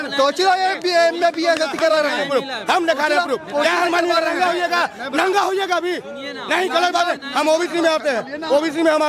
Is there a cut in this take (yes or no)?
no